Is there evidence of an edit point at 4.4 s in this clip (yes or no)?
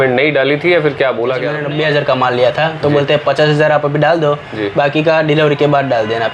no